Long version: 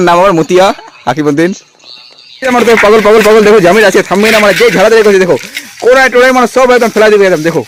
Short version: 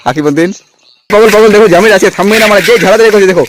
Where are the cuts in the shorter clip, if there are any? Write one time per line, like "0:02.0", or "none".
0:01.1